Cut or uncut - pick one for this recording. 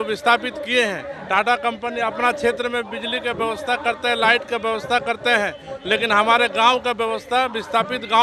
uncut